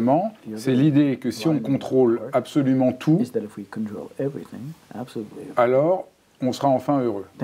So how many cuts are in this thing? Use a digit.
0